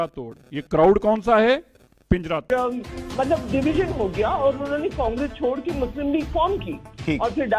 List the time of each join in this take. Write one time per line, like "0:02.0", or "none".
0:02.5